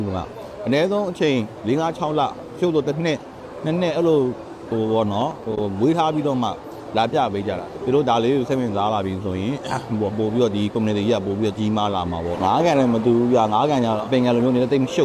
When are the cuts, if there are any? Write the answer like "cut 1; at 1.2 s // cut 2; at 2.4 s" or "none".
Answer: cut 1; at 7.7 s // cut 2; at 12.4 s // cut 3; at 14.0 s